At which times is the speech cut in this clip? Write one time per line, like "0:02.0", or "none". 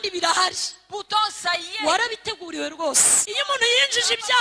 0:03.2

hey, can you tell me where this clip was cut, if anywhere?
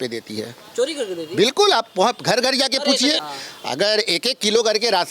0:03.3

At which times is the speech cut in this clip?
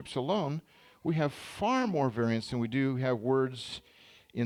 none

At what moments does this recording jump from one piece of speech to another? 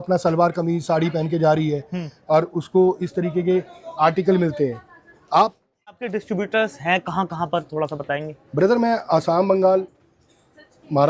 0:06.1

